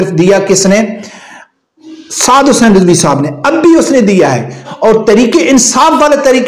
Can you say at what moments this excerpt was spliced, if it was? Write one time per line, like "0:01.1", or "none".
0:04.6